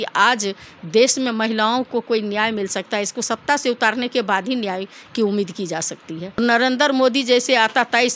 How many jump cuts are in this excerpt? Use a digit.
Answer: 1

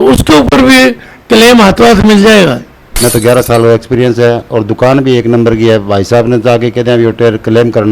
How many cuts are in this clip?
1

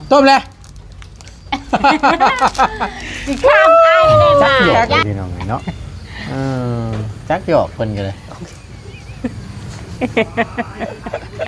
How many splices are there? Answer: 1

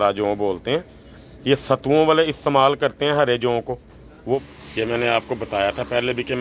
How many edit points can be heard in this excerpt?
1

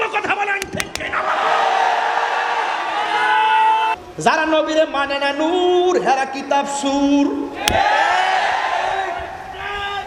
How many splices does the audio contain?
1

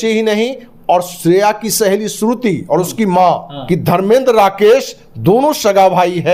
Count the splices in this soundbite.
1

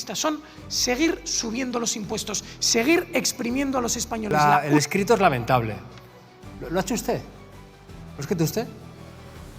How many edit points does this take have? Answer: 1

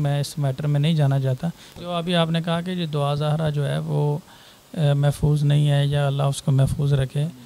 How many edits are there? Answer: 1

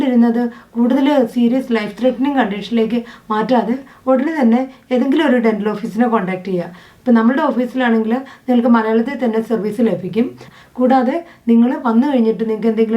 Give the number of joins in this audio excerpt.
1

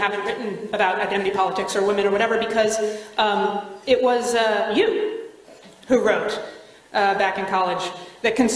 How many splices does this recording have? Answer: 1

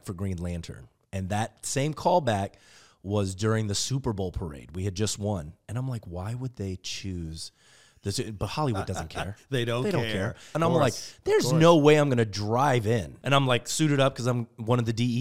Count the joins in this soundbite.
2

